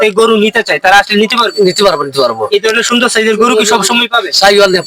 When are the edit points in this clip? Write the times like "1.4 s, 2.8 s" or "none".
none